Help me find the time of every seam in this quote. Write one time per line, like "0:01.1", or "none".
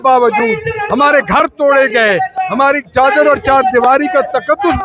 none